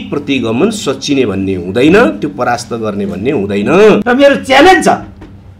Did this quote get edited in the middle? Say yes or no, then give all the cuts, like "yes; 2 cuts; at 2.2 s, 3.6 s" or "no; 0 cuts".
yes; 1 cut; at 4.0 s